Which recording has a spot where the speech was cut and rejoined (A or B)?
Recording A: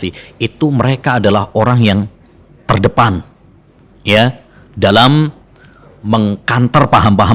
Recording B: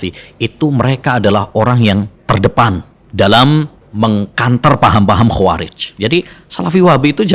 B